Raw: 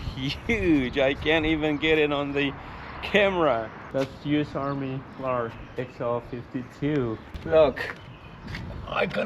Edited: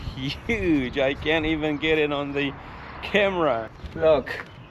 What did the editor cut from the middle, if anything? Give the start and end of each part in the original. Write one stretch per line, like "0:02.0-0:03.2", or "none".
0:03.8-0:07.3